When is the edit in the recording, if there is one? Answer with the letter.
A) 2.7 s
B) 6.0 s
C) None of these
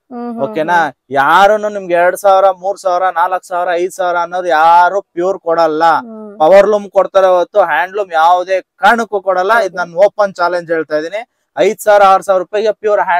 C